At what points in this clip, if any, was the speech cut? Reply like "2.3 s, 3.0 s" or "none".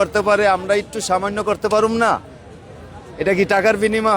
none